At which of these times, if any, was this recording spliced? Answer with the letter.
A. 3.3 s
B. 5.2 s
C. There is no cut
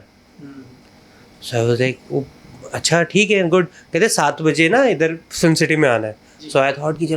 C